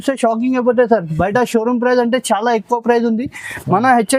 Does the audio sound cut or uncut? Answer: uncut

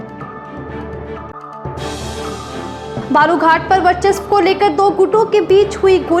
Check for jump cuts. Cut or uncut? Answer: uncut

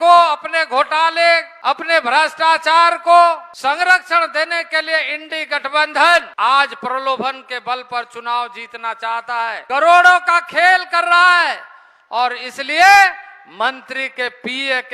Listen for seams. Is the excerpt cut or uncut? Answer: cut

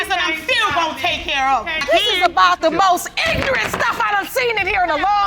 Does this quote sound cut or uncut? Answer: uncut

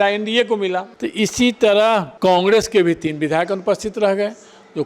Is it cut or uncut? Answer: cut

